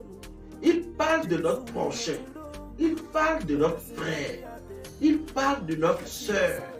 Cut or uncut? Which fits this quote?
uncut